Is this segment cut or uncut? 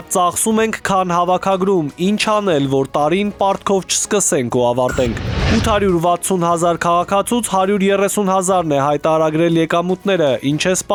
uncut